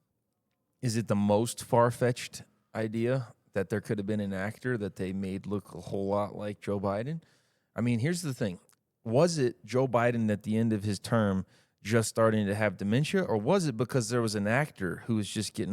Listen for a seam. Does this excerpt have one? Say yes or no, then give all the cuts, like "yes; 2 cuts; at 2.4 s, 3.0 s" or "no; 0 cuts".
no; 0 cuts